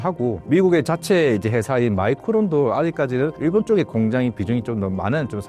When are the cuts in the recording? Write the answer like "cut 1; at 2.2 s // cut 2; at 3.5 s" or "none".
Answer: none